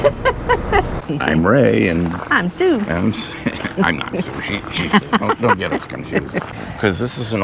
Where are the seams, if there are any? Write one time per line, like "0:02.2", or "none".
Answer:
0:01.1
0:06.5